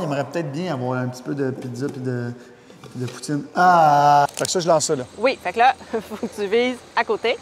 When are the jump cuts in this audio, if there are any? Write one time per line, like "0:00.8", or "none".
0:04.3